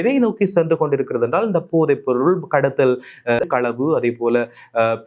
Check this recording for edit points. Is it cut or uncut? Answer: cut